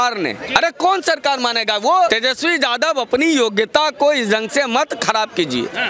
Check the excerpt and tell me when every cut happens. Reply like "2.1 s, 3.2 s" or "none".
2.1 s